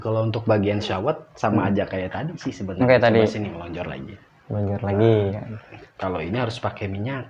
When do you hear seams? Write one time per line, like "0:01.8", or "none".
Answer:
none

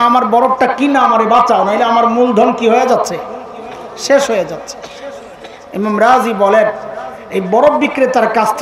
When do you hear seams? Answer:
none

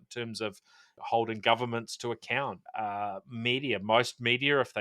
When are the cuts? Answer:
0:00.9
0:03.1

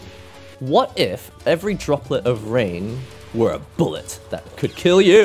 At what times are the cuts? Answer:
0:01.2

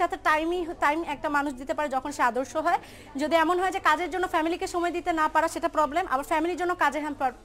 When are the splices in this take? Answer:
none

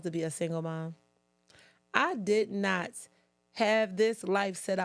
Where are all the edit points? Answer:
none

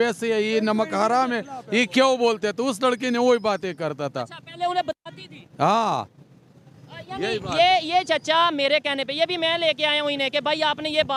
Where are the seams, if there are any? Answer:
none

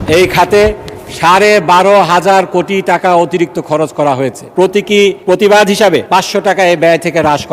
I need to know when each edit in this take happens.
0:04.4
0:05.2
0:06.0

